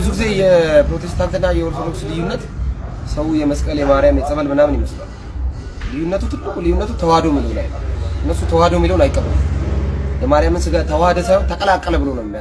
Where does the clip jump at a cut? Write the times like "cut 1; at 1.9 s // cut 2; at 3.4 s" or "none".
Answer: none